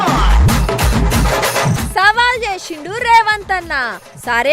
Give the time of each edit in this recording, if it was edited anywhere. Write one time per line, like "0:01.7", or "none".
0:01.8